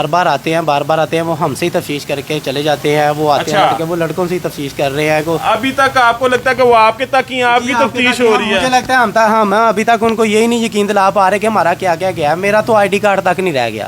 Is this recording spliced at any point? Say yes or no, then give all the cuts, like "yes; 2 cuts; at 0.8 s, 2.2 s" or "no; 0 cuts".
no; 0 cuts